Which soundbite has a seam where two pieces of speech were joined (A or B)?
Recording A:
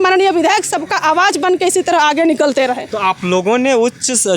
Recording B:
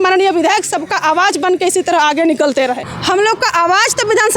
B